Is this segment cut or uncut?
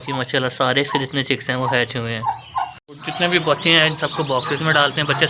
cut